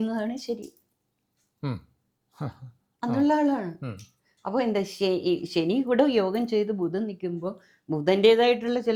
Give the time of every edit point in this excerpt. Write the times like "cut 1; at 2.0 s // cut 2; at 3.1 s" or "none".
none